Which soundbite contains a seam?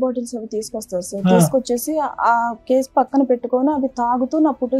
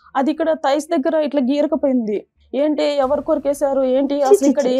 second; 1 cut; at 2.4 s

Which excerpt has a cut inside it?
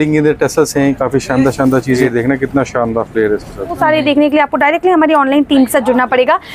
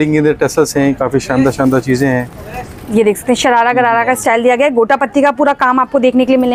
first; 2 cuts; at 2.0 s, 3.8 s

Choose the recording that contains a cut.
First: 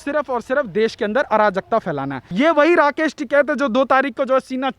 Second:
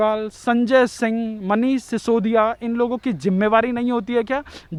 first; 1 cut; at 2.2 s

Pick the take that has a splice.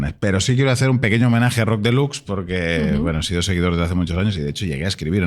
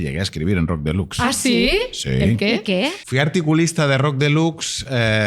second; 1 cut; at 3.0 s

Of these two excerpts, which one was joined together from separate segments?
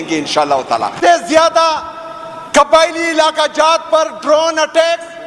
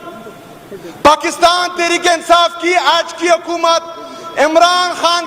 first; 1 cut; at 0.9 s

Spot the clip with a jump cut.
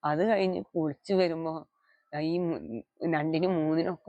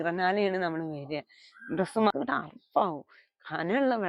second; 1 cut; at 2.1 s

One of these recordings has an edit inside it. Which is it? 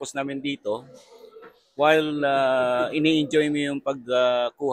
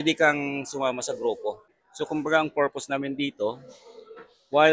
second; 1 cut; at 1.8 s

